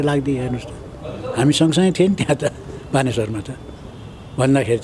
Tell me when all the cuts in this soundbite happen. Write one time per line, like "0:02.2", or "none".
none